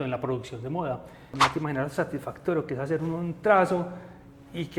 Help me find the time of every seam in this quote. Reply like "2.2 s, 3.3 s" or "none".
1.3 s